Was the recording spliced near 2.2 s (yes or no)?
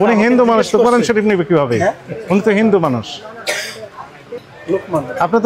no